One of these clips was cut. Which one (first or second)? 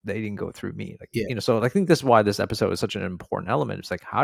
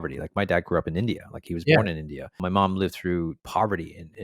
second